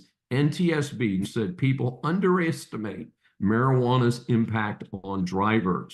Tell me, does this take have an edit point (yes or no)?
yes